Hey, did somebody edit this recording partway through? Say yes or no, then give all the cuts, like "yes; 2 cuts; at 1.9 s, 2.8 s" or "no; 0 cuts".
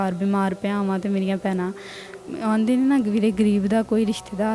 yes; 1 cut; at 2.3 s